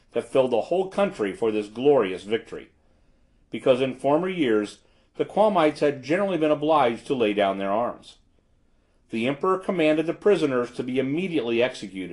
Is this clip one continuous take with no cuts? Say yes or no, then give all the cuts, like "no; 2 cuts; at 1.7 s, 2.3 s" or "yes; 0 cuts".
yes; 0 cuts